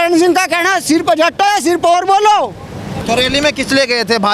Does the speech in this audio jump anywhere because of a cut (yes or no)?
yes